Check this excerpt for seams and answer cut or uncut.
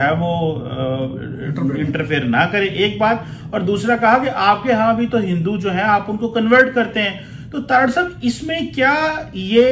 uncut